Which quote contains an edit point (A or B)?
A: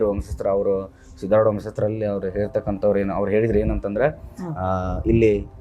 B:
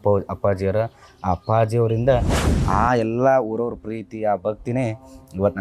B